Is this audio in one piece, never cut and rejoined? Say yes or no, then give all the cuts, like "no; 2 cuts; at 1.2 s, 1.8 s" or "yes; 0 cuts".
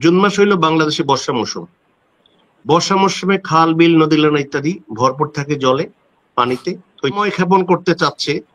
no; 1 cut; at 7.2 s